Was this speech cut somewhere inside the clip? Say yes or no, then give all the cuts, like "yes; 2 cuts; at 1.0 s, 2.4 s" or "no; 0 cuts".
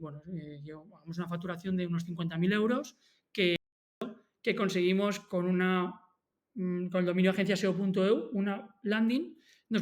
yes; 1 cut; at 4.1 s